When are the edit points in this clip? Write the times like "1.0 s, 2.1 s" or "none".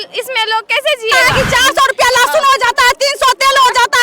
1.3 s